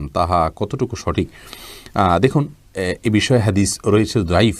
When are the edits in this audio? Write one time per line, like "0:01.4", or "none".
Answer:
none